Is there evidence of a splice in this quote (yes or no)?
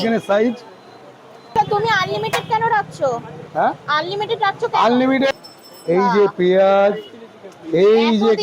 yes